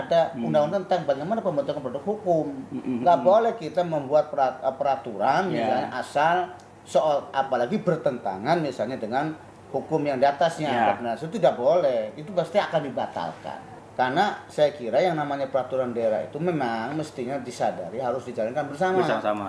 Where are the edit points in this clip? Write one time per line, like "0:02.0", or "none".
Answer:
0:13.8